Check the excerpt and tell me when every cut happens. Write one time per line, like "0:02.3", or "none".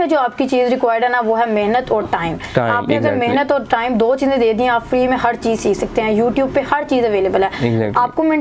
none